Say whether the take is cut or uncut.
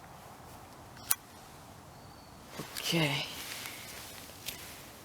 uncut